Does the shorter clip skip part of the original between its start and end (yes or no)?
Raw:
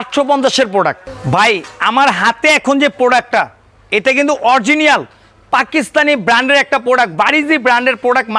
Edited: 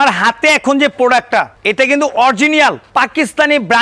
yes